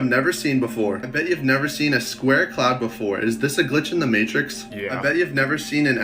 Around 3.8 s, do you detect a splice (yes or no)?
no